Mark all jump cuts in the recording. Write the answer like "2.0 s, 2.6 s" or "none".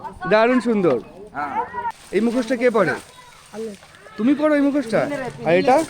1.9 s